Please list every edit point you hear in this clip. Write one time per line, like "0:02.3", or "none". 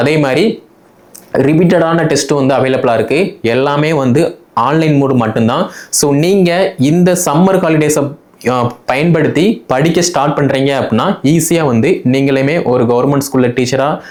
none